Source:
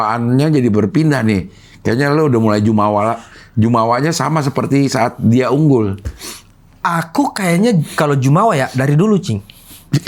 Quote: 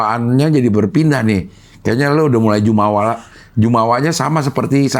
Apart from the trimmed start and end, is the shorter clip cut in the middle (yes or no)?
no